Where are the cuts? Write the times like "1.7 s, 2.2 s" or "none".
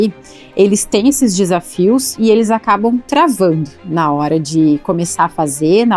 none